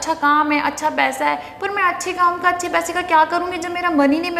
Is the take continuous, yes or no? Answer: yes